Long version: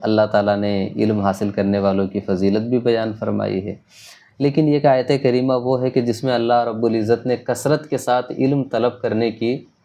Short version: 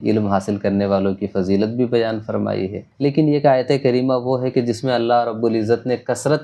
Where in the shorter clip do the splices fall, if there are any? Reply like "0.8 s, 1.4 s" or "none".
2.8 s

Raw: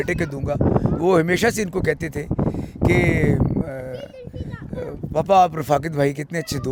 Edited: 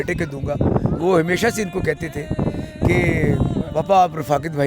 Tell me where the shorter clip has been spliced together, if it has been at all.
3.7 s

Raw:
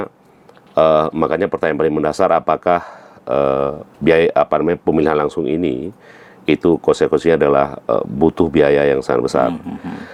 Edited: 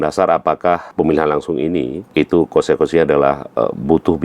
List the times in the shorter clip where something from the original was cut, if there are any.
0.9 s, 2.0 s

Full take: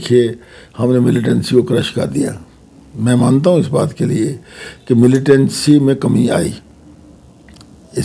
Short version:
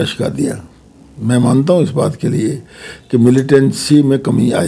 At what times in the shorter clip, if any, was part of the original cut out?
none

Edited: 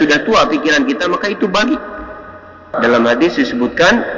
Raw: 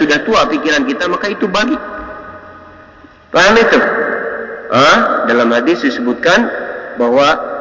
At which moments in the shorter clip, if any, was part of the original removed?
2.7 s

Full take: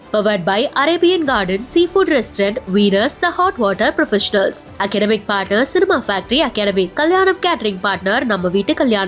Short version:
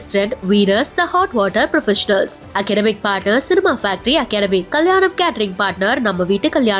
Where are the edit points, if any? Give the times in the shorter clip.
none

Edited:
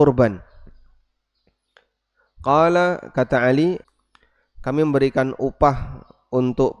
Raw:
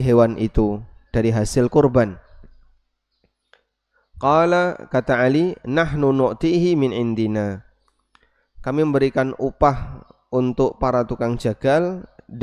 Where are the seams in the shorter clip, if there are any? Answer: 3.8 s

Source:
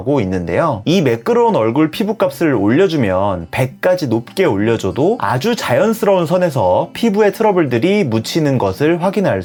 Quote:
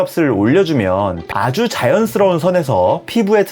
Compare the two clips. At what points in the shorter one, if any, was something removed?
1.3 s

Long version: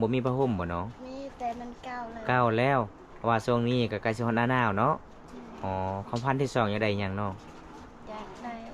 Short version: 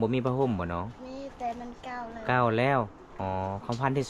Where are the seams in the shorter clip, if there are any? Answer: 3.0 s

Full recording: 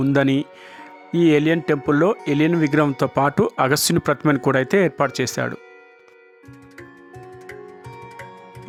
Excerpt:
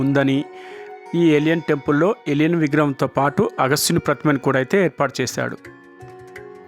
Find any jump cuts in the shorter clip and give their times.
5.6 s

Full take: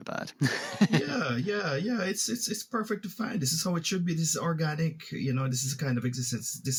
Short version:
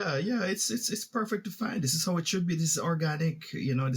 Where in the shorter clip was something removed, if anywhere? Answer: none

